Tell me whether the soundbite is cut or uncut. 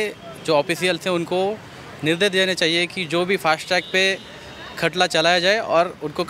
uncut